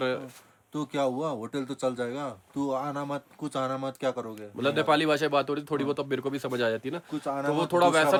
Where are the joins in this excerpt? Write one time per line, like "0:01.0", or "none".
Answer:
none